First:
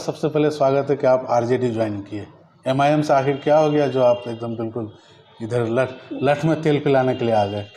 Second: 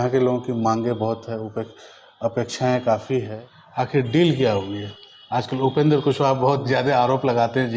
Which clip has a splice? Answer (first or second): second